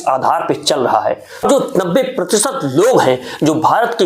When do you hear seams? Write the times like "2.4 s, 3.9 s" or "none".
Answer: 1.4 s